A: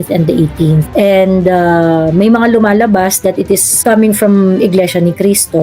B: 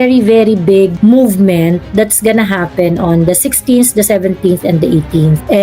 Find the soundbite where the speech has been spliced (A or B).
A